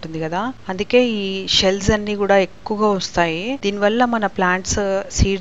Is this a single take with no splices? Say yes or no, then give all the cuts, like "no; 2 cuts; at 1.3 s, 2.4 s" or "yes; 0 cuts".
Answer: yes; 0 cuts